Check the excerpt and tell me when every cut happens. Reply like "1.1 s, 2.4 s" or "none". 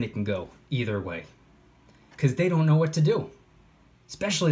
none